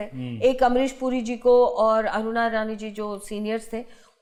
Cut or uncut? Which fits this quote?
uncut